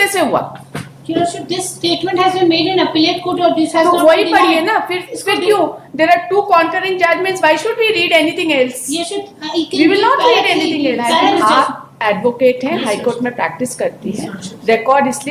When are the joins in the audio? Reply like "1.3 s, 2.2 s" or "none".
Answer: 11.4 s